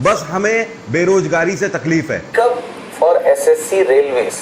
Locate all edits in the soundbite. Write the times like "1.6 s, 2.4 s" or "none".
2.2 s